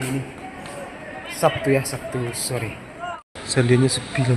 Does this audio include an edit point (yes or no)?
yes